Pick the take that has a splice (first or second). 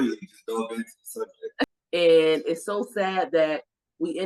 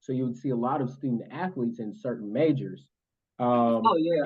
first